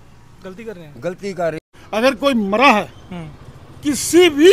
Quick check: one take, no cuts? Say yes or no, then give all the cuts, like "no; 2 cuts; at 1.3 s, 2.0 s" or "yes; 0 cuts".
no; 1 cut; at 1.6 s